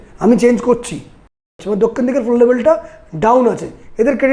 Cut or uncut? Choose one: cut